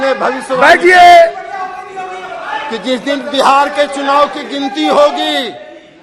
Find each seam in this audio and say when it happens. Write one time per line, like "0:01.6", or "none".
none